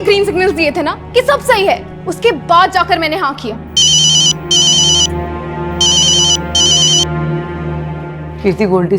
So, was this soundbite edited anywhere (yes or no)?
no